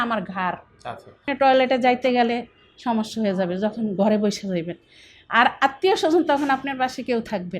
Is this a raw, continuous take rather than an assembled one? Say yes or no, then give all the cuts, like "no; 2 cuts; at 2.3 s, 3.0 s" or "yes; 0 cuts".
no; 1 cut; at 1.2 s